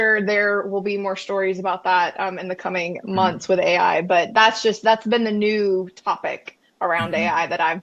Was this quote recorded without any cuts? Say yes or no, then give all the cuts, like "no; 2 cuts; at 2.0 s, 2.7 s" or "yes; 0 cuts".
yes; 0 cuts